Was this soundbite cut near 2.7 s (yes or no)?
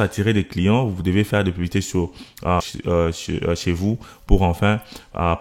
yes